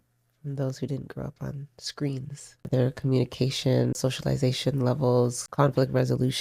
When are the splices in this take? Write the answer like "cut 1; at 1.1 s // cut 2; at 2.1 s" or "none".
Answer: cut 1; at 2.7 s // cut 2; at 4.0 s // cut 3; at 5.4 s